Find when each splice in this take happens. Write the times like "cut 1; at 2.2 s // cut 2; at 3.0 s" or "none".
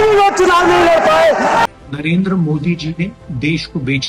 cut 1; at 1.6 s